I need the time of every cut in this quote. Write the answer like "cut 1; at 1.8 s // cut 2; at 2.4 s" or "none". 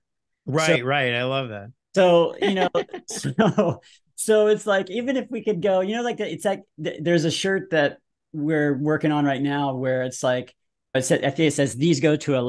cut 1; at 11.0 s

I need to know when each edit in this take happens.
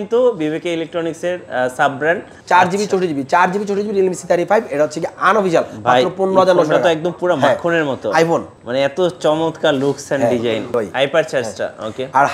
cut 1; at 2.3 s // cut 2; at 8.6 s // cut 3; at 10.7 s

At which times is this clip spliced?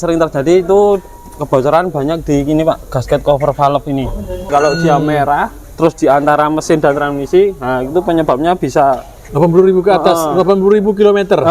cut 1; at 4.5 s // cut 2; at 5.6 s // cut 3; at 9.2 s

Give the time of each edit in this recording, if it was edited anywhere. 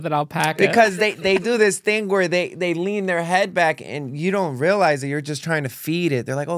none

